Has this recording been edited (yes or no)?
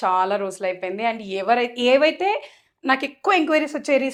no